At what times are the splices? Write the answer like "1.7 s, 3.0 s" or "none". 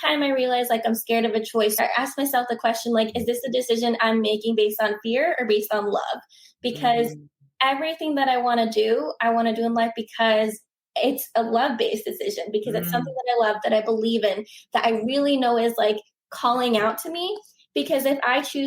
1.7 s